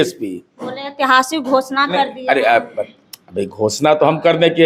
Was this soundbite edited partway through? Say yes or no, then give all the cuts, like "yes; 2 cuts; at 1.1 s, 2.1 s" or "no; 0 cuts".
no; 0 cuts